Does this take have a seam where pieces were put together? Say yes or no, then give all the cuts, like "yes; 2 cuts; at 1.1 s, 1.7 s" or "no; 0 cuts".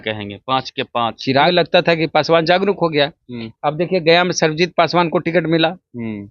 yes; 1 cut; at 1.5 s